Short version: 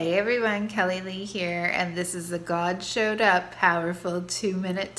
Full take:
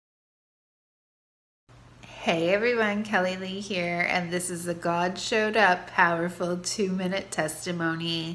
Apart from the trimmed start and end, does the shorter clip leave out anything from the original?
no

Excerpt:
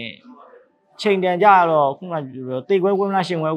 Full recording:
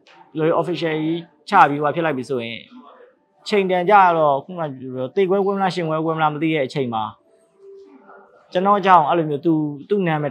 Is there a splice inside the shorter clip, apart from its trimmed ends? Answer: no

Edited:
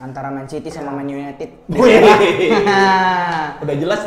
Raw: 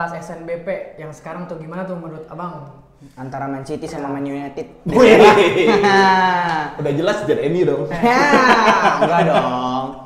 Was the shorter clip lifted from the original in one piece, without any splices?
yes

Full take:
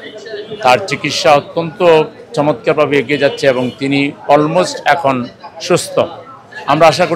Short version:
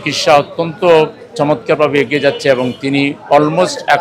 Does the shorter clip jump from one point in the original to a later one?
no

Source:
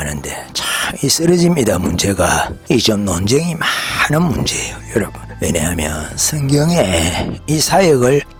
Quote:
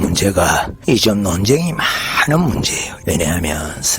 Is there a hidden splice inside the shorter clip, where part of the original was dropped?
yes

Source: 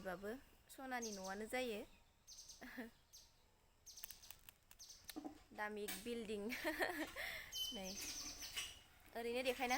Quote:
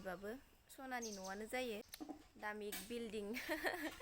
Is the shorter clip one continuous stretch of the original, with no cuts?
no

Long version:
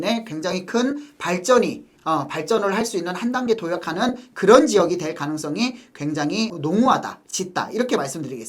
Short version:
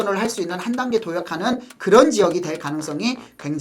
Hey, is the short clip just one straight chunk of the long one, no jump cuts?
yes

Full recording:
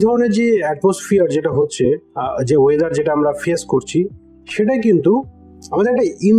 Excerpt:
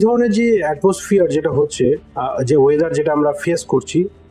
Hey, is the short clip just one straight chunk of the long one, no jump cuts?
yes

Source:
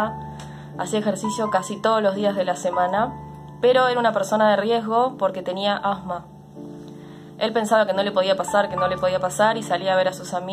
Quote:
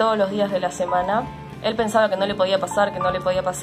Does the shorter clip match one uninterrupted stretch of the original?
no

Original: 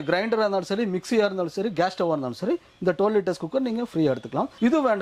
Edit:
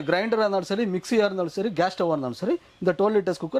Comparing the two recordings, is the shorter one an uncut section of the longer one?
yes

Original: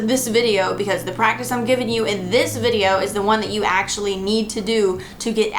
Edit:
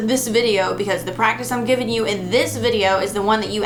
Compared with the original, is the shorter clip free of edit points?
yes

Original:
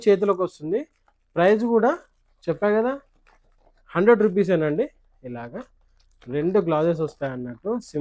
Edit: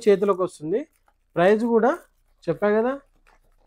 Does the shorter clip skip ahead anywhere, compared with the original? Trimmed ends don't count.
no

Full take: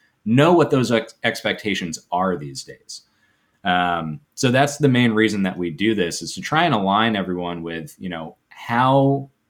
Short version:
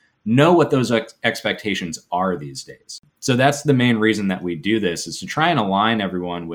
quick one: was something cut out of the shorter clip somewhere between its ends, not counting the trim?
yes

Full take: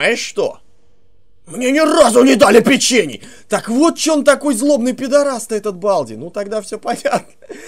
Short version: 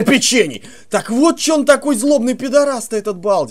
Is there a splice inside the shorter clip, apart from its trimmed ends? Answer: no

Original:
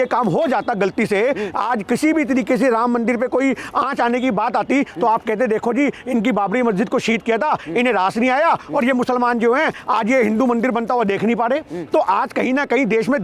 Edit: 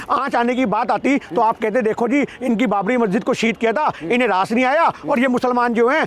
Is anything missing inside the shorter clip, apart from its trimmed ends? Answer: no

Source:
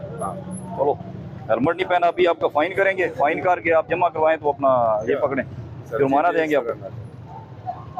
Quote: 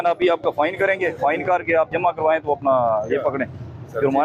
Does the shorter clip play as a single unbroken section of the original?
yes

